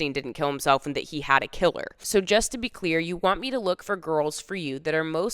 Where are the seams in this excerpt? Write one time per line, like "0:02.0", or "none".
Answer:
0:02.0